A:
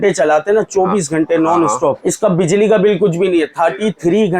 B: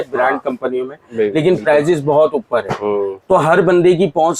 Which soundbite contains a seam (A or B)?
A